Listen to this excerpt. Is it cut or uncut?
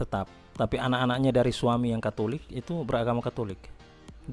uncut